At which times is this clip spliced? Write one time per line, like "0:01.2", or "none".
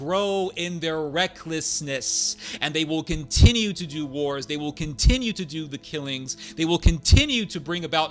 none